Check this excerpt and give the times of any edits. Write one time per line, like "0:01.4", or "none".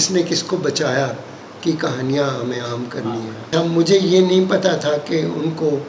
0:03.5